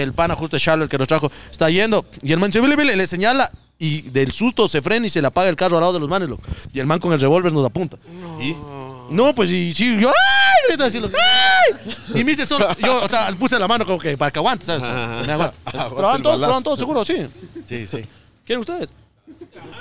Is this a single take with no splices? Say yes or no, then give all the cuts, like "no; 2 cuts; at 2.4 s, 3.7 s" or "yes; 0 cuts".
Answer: yes; 0 cuts